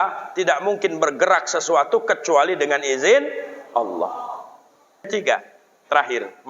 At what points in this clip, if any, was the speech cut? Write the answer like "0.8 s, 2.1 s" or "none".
5.1 s

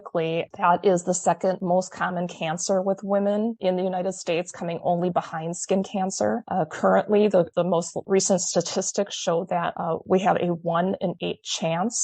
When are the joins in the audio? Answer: none

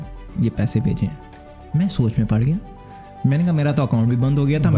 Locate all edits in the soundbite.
none

